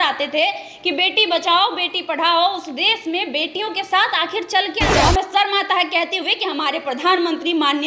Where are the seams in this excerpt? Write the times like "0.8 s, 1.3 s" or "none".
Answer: 4.9 s